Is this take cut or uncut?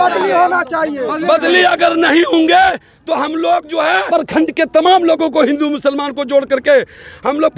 cut